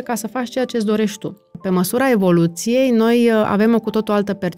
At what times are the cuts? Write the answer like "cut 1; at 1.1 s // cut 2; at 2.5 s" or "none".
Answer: cut 1; at 1.6 s